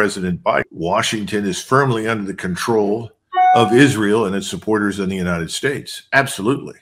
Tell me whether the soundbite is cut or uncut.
uncut